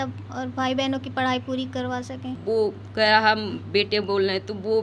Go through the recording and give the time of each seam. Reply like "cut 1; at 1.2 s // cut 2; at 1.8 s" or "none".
cut 1; at 2.3 s